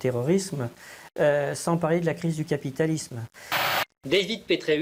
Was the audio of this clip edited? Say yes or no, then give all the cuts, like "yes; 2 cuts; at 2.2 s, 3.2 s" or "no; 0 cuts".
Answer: yes; 1 cut; at 3.6 s